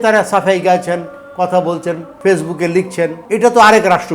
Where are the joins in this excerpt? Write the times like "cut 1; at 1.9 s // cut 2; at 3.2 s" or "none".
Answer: cut 1; at 2.1 s // cut 2; at 3.2 s